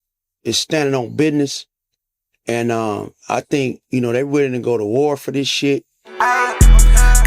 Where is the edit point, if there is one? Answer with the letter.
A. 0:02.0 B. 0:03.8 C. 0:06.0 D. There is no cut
C